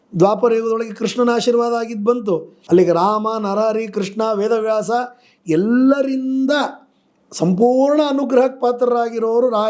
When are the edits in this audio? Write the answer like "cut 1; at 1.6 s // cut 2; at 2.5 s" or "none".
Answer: cut 1; at 2.5 s